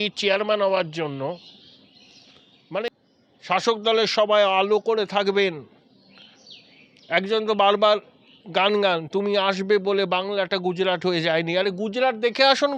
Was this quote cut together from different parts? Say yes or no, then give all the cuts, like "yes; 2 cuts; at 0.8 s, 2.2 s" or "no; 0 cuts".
yes; 1 cut; at 3.1 s